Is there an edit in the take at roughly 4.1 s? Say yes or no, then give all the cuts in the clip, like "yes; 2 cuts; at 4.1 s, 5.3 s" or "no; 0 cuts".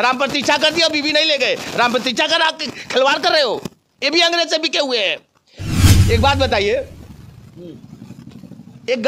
no; 1 cut; at 5.9 s